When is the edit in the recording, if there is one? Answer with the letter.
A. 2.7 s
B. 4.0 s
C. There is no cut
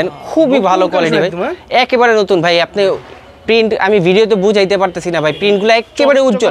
C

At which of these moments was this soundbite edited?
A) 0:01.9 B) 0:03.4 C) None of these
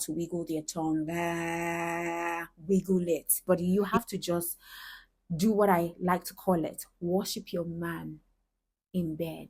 B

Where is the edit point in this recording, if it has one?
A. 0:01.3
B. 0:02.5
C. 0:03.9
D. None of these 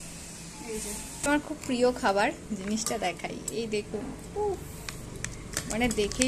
A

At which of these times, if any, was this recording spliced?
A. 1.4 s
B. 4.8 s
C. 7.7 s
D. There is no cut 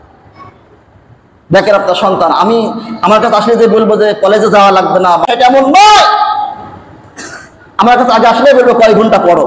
D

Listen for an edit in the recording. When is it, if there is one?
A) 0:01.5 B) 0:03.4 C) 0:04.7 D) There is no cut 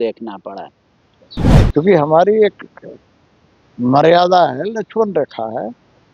A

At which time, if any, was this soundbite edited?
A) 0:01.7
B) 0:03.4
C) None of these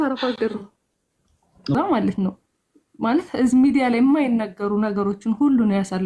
A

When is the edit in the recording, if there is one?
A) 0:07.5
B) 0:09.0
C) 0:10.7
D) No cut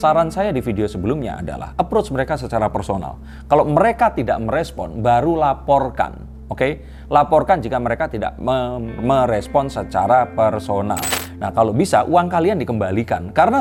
D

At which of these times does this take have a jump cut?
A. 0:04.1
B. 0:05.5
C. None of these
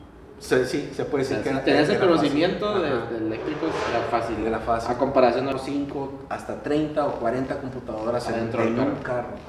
B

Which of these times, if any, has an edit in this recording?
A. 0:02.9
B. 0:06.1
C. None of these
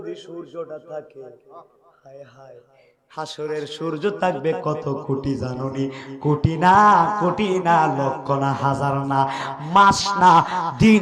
C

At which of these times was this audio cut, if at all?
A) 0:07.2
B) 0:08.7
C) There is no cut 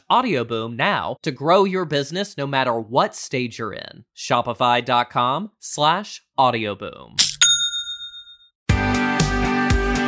B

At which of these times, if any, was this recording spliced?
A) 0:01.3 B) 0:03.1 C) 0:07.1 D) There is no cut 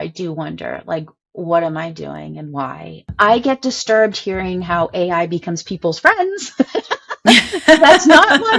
B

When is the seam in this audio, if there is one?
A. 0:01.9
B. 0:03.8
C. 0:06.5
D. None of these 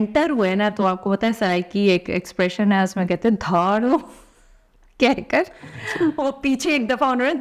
D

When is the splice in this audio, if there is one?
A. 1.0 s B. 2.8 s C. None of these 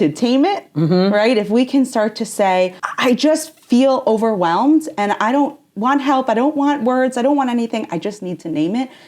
B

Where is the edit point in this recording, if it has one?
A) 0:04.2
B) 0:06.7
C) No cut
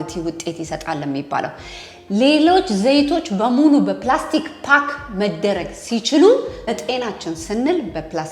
B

